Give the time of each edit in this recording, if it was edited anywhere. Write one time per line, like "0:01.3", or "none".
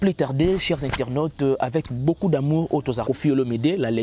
0:03.0